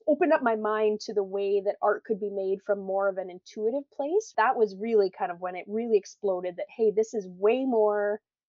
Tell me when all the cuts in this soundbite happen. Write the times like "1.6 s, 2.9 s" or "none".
4.3 s